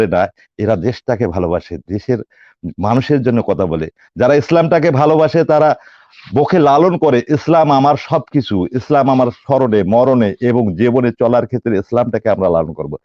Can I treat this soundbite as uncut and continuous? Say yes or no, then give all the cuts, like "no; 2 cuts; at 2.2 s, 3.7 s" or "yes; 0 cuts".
yes; 0 cuts